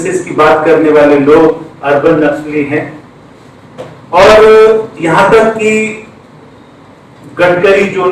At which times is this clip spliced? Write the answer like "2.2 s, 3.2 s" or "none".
none